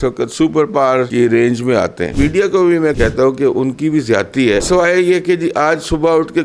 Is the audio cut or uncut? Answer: cut